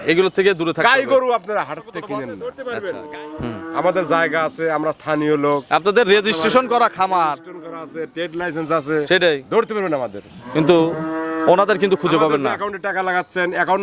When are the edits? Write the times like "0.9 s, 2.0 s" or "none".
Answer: 2.4 s